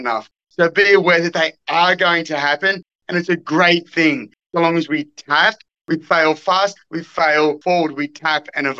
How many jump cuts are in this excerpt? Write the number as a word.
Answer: one